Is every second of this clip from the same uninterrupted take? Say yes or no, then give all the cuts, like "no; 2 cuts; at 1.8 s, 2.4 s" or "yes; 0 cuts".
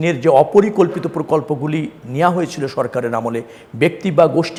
yes; 0 cuts